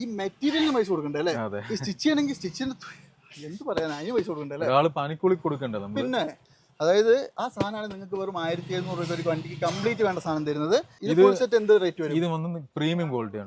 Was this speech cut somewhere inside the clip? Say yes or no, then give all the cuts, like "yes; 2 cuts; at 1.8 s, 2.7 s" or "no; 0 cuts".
yes; 1 cut; at 10.9 s